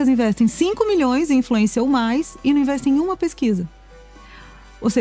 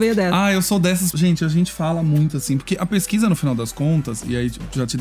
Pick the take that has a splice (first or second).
second